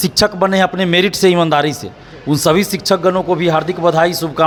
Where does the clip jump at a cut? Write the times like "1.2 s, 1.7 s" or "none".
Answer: none